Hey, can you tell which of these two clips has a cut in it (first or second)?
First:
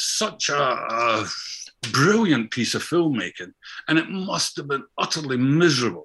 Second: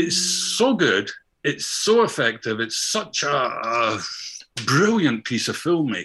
second